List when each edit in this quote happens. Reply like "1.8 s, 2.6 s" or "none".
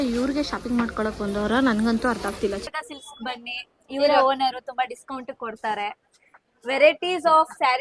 2.7 s